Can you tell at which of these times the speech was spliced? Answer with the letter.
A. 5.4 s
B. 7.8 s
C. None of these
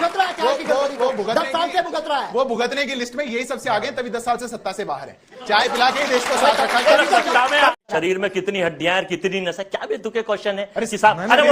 B